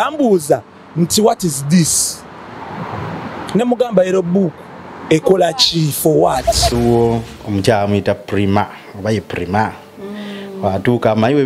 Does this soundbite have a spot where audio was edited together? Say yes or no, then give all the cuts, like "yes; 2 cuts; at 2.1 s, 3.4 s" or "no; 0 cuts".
yes; 1 cut; at 6.7 s